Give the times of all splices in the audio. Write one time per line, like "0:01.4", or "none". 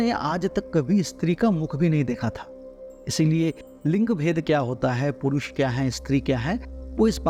none